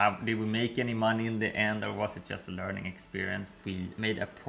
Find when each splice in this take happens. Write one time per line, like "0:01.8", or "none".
0:03.5